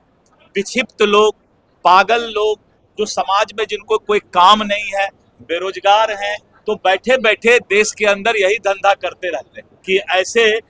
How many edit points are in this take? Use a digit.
1